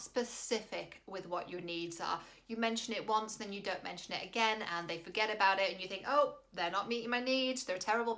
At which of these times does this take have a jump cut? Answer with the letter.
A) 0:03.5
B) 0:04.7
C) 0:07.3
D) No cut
D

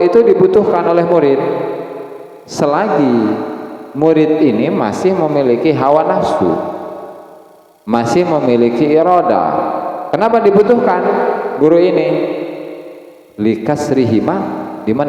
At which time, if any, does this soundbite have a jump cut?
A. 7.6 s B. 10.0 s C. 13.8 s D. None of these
D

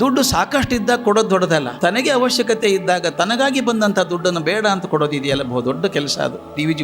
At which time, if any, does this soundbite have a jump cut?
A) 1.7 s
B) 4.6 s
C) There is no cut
A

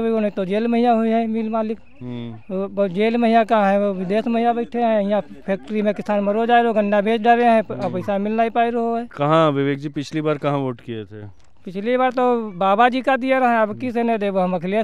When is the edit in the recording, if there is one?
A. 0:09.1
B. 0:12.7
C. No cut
A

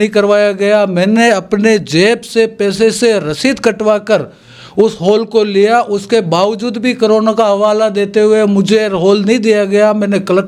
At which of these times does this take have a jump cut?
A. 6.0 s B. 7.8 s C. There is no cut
C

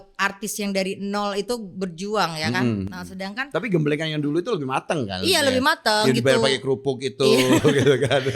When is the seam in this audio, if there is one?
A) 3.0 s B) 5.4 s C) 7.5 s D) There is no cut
D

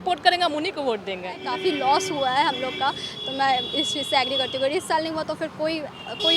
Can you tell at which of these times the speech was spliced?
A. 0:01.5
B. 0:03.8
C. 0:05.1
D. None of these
A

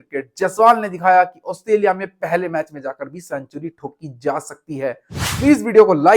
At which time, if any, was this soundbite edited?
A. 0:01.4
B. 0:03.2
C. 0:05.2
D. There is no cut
C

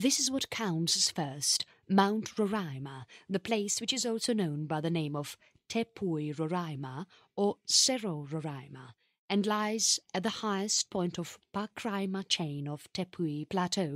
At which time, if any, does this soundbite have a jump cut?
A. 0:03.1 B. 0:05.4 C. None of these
B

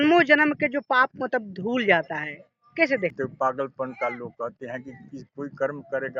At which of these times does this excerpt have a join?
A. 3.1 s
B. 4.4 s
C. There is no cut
A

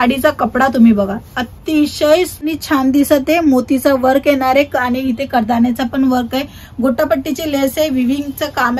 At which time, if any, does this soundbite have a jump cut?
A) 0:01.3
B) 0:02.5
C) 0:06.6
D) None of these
B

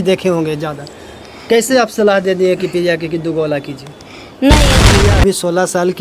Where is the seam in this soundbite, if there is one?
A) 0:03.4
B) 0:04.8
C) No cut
B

